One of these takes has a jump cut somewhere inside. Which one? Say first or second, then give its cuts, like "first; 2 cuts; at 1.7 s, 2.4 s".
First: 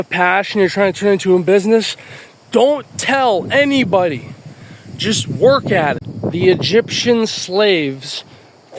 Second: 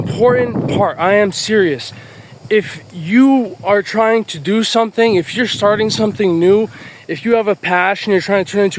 first; 1 cut; at 6.1 s